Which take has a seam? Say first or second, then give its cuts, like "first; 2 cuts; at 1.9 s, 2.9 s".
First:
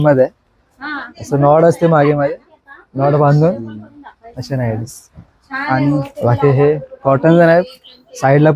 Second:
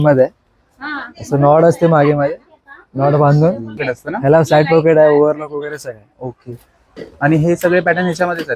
second; 1 cut; at 3.9 s